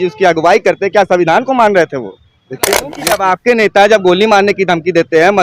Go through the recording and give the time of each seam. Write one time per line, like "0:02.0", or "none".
0:02.9